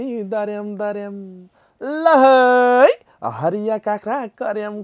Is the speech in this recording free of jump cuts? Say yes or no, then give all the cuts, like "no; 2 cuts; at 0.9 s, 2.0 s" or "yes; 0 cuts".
yes; 0 cuts